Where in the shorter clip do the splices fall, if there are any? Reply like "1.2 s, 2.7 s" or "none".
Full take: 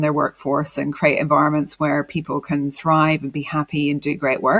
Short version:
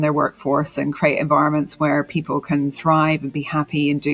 none

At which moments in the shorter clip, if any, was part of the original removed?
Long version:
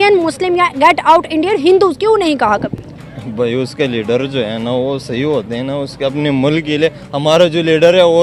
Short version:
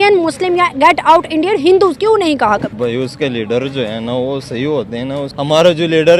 2.7 s, 5.3 s

